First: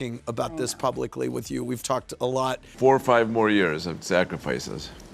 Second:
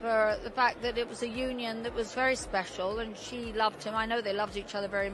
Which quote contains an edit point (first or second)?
first